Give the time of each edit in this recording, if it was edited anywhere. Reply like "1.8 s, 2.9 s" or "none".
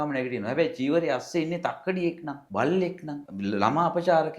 2.3 s, 3.3 s